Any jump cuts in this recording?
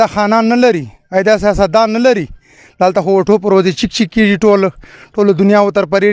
no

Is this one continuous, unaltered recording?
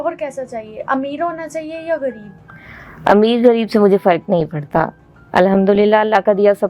yes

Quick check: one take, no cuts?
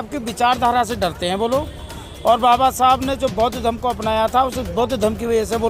yes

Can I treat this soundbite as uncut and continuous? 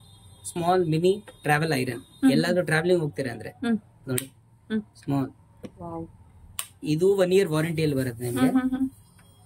yes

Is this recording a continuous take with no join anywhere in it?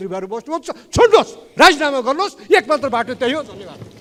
yes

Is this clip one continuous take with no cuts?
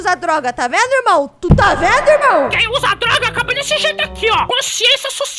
no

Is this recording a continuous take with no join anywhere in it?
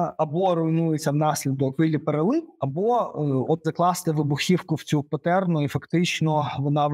no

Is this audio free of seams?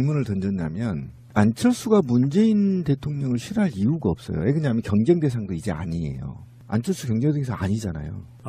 yes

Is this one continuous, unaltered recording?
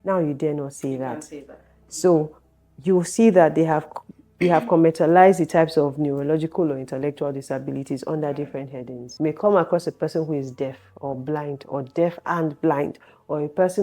no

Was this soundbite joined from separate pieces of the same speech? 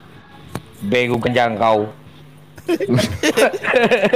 no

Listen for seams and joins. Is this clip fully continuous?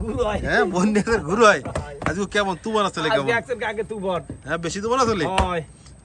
yes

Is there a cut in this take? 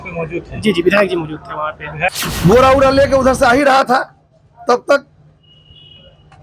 yes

